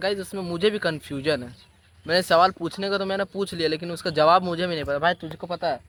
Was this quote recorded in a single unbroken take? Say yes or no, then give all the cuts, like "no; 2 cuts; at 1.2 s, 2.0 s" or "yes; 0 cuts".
yes; 0 cuts